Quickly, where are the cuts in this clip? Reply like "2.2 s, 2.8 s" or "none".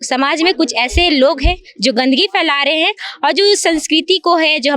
none